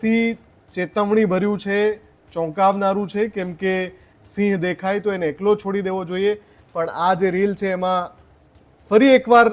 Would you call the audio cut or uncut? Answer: uncut